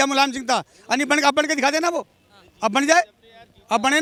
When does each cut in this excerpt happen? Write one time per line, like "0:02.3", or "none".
none